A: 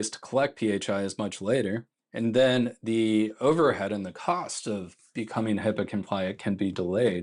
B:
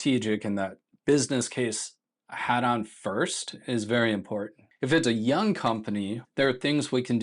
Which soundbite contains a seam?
B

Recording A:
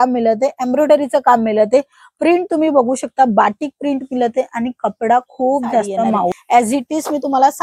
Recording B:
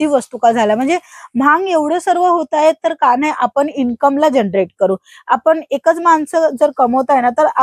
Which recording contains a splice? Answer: A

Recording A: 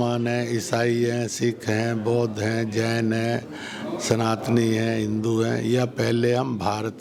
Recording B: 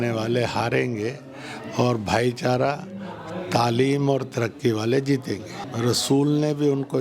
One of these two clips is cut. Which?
B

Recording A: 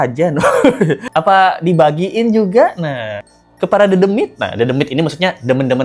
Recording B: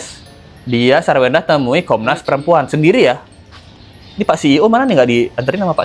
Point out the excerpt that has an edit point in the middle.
A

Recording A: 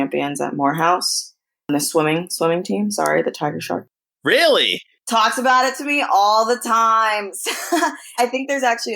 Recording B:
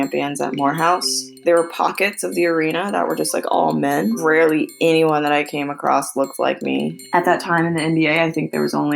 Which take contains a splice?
B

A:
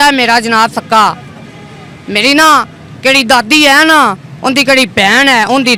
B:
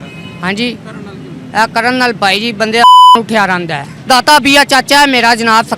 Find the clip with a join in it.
B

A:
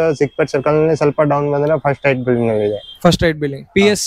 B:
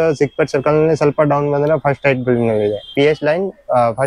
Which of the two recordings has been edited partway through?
B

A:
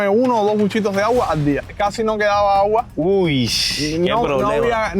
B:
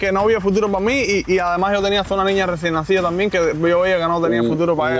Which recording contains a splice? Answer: A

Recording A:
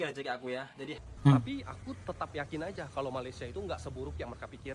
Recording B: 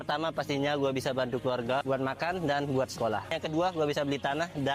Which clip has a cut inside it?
A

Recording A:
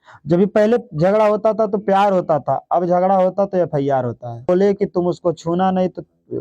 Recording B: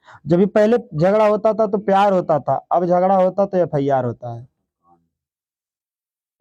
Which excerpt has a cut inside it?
A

